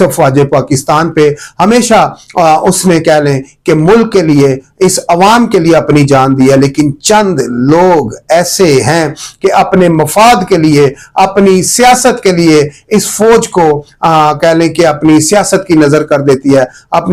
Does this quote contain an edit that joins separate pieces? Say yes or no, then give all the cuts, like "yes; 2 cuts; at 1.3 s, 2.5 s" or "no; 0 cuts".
no; 0 cuts